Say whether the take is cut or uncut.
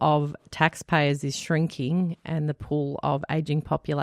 uncut